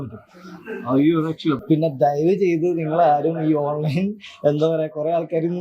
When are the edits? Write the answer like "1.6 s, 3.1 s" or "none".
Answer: 1.6 s